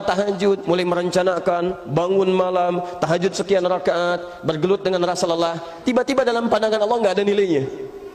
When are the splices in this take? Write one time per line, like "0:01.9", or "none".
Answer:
none